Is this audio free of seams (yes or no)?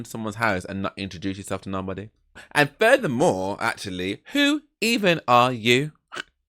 no